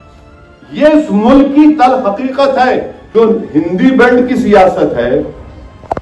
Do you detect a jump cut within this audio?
yes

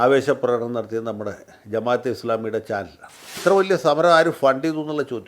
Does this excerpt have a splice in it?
yes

